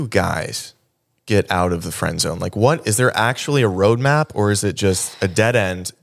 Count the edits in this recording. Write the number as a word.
zero